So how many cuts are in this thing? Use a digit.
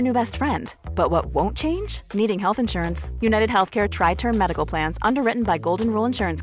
0